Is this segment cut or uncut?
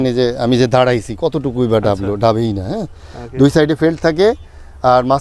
uncut